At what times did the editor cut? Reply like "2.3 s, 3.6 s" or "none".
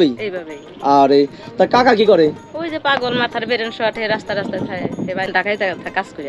5.3 s